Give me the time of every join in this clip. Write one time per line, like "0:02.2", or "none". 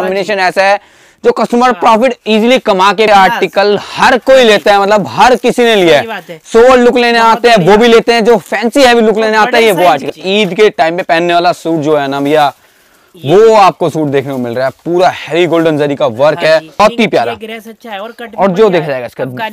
0:03.1
0:10.1
0:16.8